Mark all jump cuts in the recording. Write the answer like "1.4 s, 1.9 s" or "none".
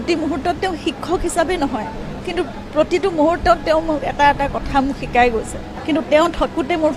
5.7 s